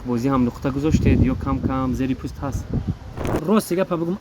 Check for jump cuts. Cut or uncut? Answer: cut